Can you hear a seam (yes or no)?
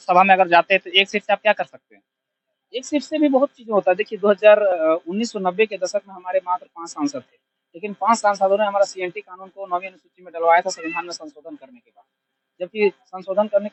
no